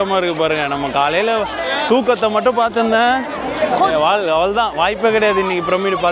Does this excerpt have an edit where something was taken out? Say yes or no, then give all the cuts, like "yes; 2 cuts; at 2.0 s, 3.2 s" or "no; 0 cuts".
no; 0 cuts